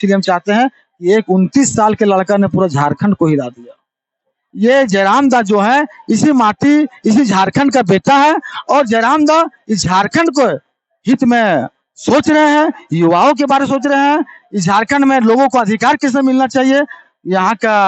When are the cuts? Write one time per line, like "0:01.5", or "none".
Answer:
0:04.4